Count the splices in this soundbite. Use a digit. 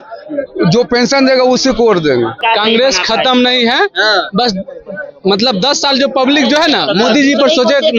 1